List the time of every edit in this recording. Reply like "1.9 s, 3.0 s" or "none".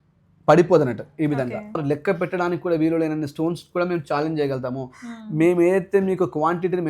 1.8 s